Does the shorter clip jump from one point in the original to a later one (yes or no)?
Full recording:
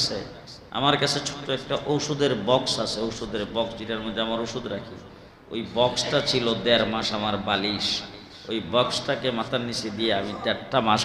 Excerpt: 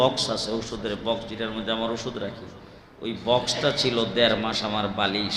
no